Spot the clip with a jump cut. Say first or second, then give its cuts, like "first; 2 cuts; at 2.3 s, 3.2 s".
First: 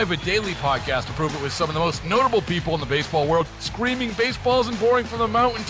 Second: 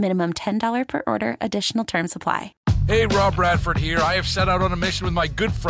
second; 1 cut; at 2.6 s